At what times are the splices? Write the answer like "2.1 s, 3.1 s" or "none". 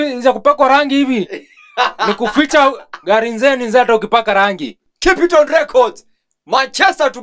4.8 s